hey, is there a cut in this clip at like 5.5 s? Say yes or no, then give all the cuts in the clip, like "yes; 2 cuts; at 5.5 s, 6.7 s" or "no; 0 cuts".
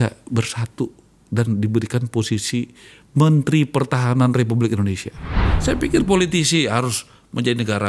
yes; 1 cut; at 5.5 s